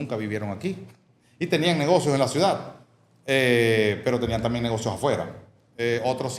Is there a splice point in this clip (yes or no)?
no